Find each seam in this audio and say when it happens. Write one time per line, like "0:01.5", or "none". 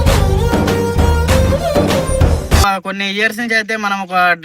0:02.6